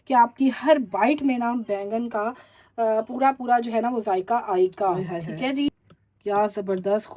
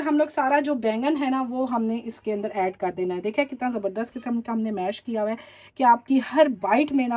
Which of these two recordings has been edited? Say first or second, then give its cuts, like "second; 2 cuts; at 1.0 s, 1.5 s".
first; 1 cut; at 5.7 s